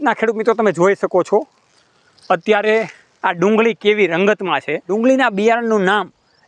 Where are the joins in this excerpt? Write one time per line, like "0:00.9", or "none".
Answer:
0:04.9